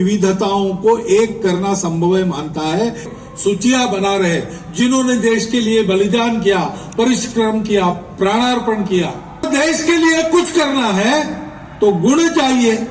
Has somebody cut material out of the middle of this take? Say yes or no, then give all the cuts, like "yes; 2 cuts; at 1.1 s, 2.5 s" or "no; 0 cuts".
yes; 2 cuts; at 3.1 s, 9.5 s